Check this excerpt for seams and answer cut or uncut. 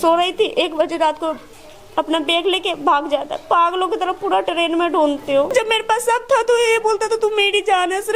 cut